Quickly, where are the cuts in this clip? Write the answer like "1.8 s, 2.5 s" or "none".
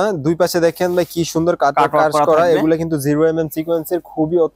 none